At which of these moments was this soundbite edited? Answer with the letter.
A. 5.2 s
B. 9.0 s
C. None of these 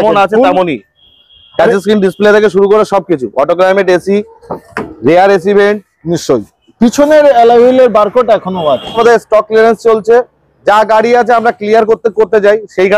B